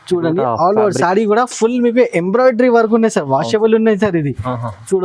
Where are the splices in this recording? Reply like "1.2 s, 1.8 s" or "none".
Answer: none